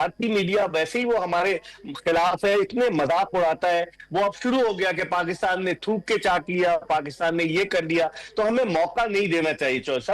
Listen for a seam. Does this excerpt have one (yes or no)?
yes